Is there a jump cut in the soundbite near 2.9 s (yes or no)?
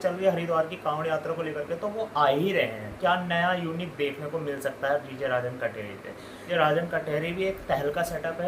yes